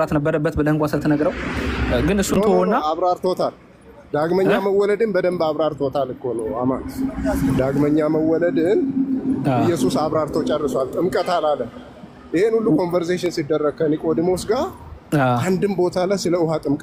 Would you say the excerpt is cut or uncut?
uncut